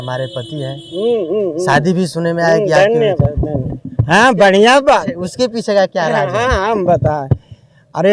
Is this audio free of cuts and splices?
yes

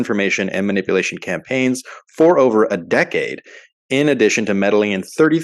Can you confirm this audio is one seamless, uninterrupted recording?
yes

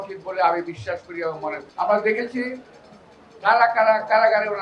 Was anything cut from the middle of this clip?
yes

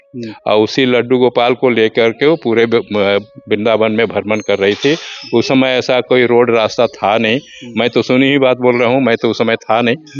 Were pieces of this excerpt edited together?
no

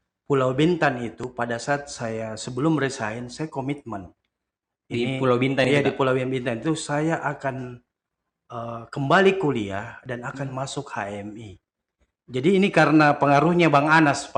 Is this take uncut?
yes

